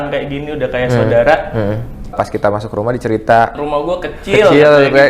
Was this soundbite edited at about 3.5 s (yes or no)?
yes